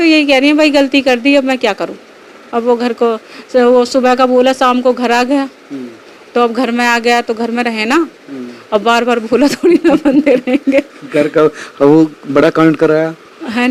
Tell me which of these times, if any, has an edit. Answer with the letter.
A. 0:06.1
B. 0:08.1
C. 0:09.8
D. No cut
D